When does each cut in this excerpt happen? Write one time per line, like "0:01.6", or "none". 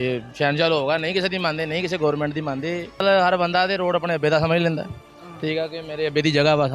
0:03.0